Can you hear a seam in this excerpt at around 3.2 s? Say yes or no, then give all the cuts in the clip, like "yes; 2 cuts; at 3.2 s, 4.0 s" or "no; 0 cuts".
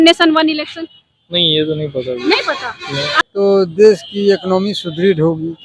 yes; 1 cut; at 3.2 s